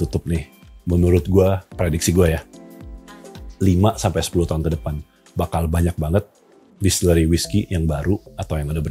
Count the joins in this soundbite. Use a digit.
0